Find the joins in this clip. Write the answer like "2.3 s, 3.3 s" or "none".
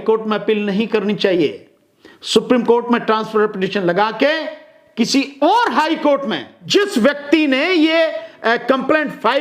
6.6 s